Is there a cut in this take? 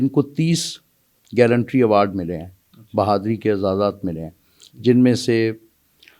yes; 1 cut; at 1.2 s

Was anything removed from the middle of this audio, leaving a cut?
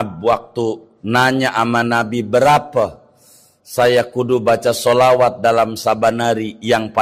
yes; 1 cut; at 0.9 s

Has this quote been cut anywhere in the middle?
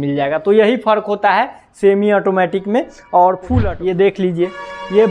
yes; 1 cut; at 3.5 s

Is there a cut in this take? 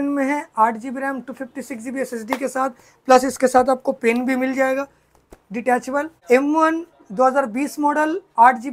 yes; 1 cut; at 6.1 s

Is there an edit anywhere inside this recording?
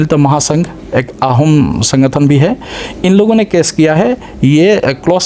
no; 0 cuts

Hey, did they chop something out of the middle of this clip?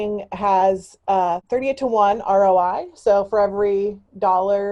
yes; 1 cut; at 1.4 s

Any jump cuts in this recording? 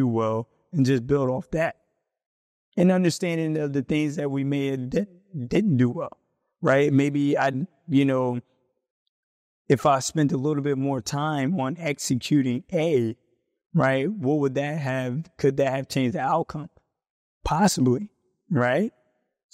no; 0 cuts

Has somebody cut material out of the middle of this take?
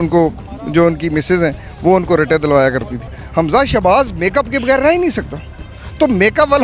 yes; 1 cut; at 3.1 s

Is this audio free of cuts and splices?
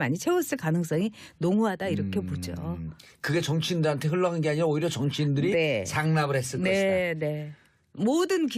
no; 1 cut; at 2.1 s

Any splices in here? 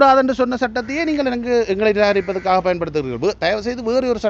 no; 0 cuts

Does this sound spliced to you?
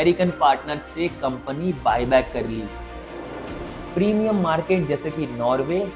yes; 1 cut; at 3.2 s

